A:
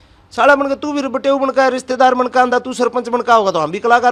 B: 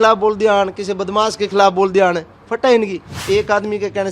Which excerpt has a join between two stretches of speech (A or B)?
B